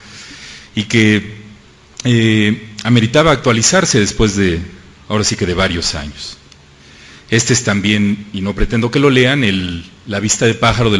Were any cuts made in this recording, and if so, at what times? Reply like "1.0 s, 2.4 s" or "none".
none